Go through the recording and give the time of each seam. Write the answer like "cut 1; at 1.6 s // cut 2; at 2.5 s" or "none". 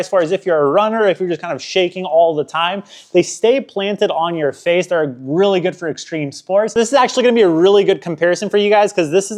none